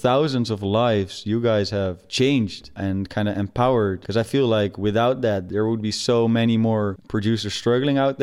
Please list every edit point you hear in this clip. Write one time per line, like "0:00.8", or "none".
0:02.1
0:02.8
0:04.0
0:05.4
0:07.0